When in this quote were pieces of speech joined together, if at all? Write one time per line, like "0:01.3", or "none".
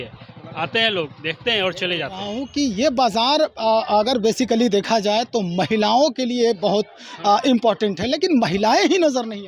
0:02.4